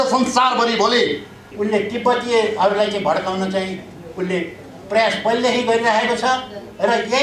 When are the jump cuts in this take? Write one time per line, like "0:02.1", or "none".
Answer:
0:01.4